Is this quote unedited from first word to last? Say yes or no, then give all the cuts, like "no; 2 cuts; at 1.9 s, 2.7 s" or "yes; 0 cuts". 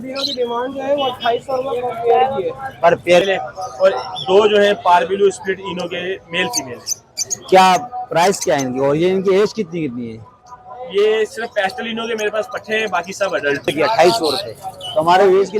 no; 2 cuts; at 3.2 s, 13.7 s